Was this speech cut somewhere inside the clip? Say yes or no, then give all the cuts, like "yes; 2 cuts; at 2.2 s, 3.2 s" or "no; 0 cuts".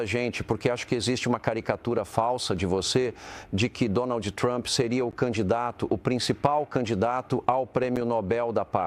no; 0 cuts